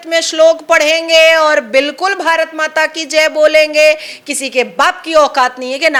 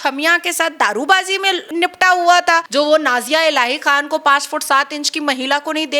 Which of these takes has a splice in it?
second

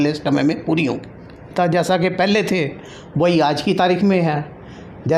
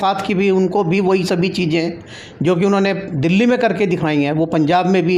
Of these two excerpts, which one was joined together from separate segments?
first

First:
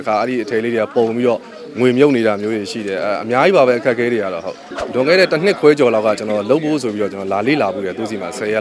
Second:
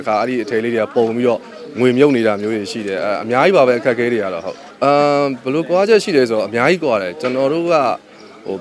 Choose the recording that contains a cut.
first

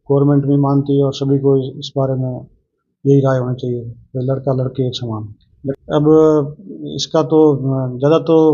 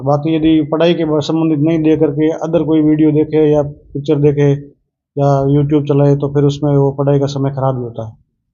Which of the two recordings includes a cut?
first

